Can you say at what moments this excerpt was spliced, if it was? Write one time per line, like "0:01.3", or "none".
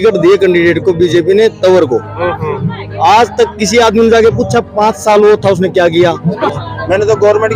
0:06.5